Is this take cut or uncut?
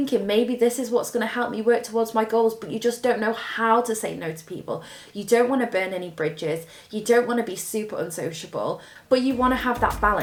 uncut